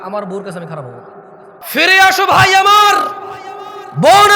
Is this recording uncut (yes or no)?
no